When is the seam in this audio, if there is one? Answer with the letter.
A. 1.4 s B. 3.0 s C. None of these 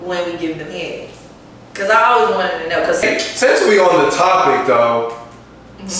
B